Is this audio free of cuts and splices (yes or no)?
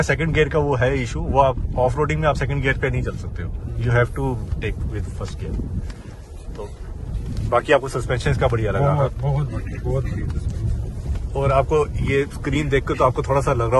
yes